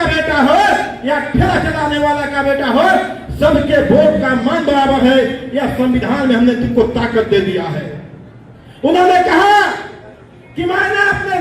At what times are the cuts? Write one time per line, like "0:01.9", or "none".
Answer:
none